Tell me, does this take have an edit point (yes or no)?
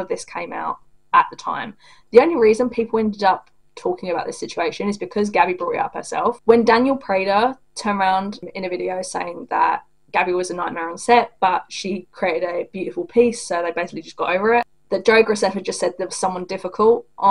no